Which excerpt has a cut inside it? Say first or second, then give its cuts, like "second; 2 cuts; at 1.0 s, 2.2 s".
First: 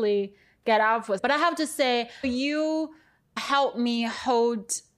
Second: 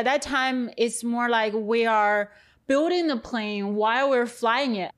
first; 2 cuts; at 1.2 s, 2.2 s